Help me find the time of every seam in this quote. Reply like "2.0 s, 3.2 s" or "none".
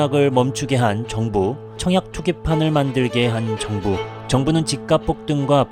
none